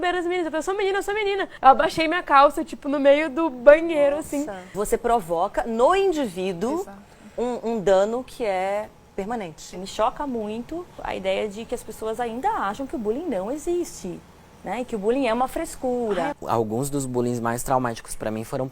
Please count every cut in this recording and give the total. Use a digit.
5